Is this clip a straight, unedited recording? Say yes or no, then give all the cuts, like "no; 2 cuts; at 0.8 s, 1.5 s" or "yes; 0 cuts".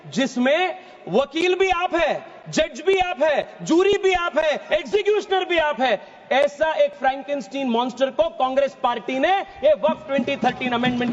yes; 0 cuts